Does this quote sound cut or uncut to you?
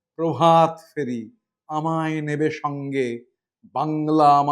uncut